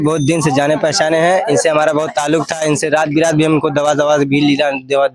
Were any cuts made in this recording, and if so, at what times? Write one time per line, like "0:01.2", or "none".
none